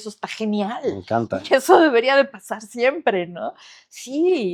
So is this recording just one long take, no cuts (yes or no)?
yes